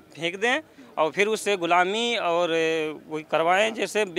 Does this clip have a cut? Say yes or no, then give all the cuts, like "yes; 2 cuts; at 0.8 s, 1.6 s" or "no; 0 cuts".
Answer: no; 0 cuts